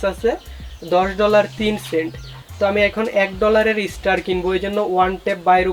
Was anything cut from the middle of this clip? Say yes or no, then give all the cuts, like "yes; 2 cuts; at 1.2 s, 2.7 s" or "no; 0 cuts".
no; 0 cuts